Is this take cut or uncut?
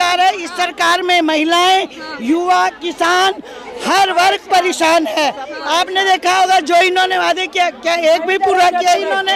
uncut